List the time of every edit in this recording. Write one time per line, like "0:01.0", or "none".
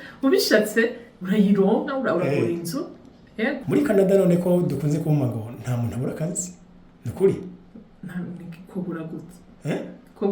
0:03.6